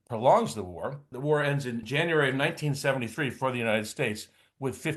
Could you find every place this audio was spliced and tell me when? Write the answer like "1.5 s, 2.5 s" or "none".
1.1 s, 1.8 s